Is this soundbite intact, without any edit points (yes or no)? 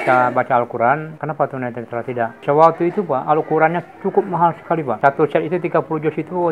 no